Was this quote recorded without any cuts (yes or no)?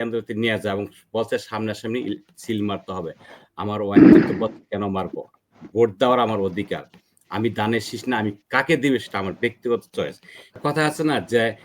no